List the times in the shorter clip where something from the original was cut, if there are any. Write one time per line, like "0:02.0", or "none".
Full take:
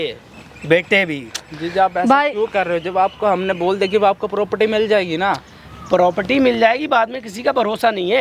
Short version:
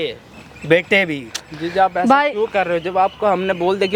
none